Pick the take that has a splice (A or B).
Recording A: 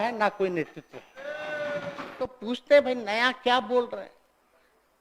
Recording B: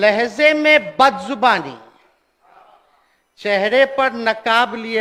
A